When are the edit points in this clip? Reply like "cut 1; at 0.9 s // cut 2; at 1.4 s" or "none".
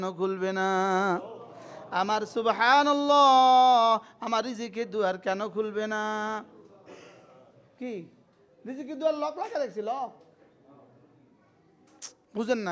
none